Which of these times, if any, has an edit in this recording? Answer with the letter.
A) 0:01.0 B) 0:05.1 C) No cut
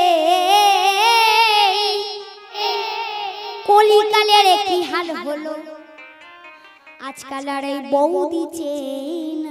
C